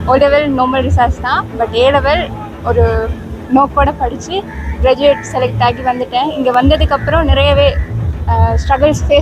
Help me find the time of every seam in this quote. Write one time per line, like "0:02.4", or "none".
none